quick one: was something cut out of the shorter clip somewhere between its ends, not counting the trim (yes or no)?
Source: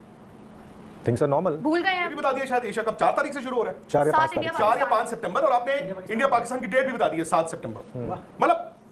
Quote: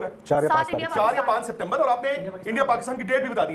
no